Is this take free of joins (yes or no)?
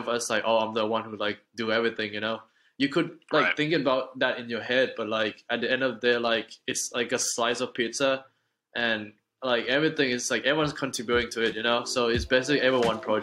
yes